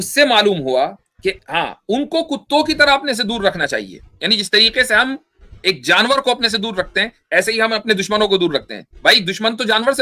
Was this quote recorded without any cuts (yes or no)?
no